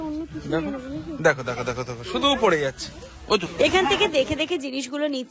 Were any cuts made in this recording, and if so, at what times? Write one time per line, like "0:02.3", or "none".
0:03.5